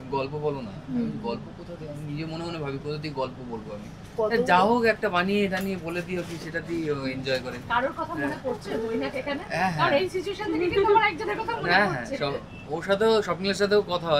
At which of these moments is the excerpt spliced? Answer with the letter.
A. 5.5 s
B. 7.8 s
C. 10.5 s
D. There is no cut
D